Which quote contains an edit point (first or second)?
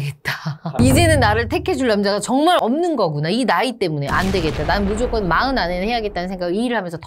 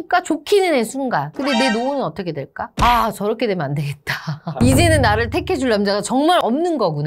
second